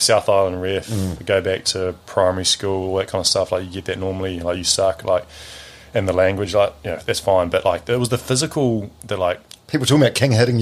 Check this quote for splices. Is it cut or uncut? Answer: uncut